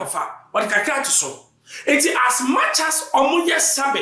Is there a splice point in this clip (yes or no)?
no